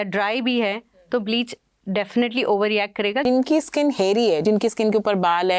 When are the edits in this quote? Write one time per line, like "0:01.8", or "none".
0:03.2
0:04.4